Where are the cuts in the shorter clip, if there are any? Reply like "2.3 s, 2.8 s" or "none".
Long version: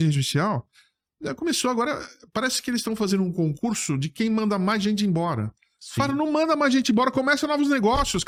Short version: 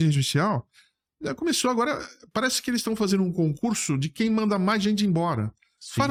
none